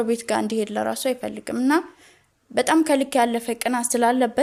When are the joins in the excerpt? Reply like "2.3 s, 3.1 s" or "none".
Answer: none

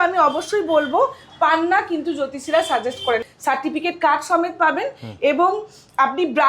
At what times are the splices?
3.2 s

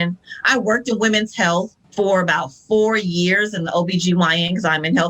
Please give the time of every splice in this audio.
1.8 s

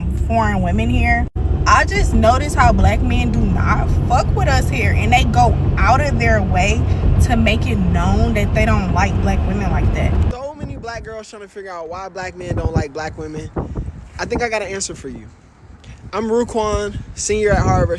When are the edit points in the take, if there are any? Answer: 10.3 s

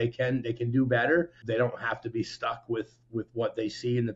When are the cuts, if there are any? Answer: 1.4 s

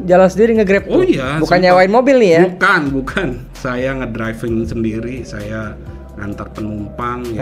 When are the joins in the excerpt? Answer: none

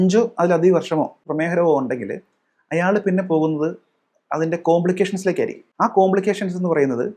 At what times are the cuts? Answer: 1.3 s, 5.6 s

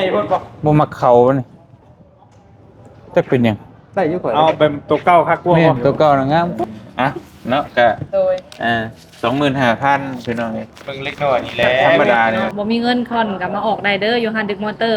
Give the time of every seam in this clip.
6.6 s, 12.5 s

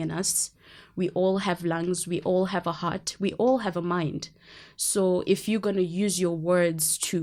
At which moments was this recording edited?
none

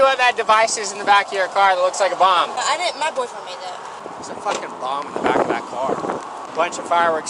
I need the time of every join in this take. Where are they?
2.6 s, 4.0 s, 6.4 s

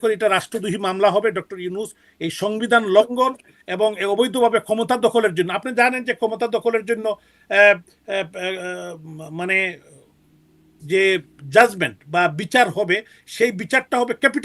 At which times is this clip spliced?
none

